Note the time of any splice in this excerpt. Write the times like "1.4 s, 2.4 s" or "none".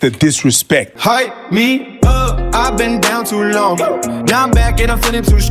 0.9 s